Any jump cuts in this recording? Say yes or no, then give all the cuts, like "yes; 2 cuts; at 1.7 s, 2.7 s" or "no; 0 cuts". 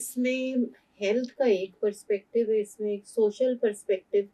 no; 0 cuts